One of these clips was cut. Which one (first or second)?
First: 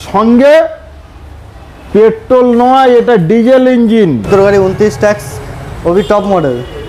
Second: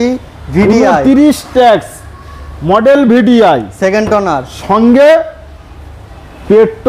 first